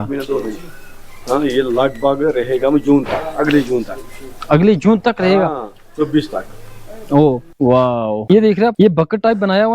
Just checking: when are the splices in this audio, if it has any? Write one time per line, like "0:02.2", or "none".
0:07.8